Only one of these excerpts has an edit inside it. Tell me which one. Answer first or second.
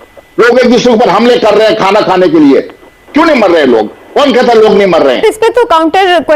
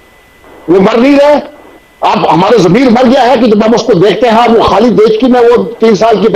first